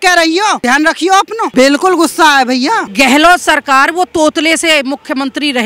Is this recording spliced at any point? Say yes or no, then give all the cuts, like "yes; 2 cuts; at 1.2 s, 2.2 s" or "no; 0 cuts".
yes; 2 cuts; at 1.0 s, 2.9 s